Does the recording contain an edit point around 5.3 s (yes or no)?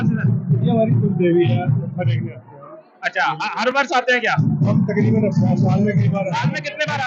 no